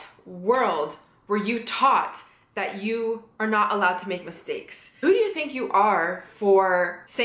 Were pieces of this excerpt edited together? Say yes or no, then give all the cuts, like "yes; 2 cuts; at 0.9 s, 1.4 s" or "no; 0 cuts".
yes; 1 cut; at 4.9 s